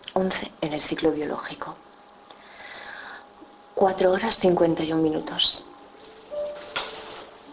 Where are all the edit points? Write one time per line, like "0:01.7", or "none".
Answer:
0:03.1